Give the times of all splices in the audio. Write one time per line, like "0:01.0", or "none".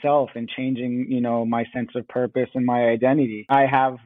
none